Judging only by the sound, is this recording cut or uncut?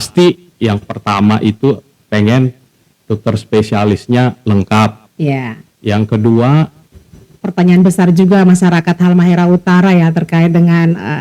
cut